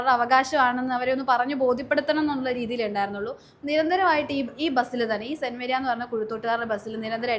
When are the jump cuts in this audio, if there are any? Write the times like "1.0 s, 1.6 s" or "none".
none